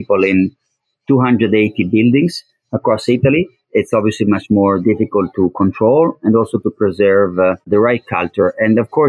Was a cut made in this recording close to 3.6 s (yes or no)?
yes